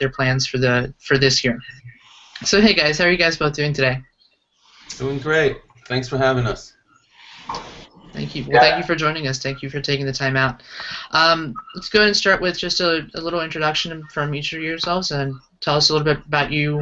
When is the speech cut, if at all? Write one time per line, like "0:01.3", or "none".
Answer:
0:13.9